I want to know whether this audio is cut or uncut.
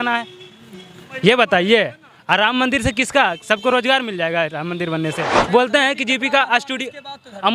cut